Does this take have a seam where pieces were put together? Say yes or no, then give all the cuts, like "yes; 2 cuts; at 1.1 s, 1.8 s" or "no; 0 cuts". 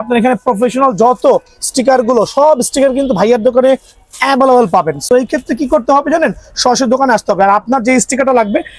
no; 0 cuts